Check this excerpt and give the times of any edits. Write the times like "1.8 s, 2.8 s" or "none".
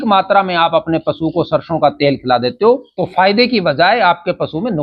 3.0 s